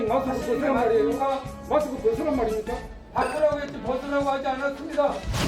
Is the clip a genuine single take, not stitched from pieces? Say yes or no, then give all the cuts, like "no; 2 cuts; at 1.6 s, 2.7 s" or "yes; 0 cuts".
no; 1 cut; at 1.5 s